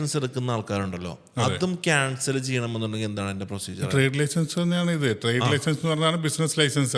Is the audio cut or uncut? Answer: uncut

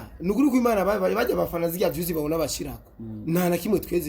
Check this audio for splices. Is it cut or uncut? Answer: uncut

